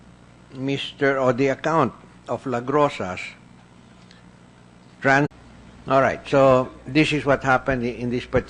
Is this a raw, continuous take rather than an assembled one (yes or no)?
yes